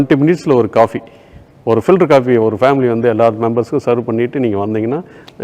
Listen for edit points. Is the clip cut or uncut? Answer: uncut